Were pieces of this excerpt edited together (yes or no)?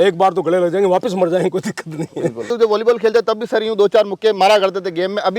yes